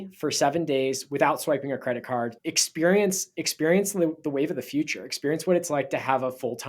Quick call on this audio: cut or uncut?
cut